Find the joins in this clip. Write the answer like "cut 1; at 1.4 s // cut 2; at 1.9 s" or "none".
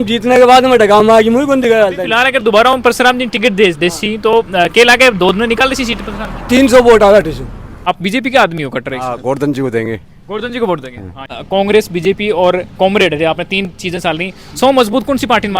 cut 1; at 2.0 s // cut 2; at 7.8 s // cut 3; at 11.4 s